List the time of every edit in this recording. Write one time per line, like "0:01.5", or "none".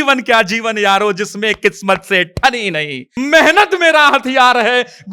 0:03.1